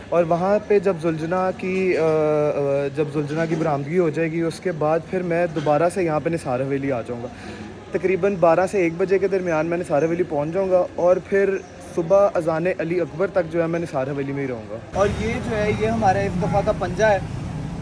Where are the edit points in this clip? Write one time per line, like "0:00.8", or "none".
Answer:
0:14.8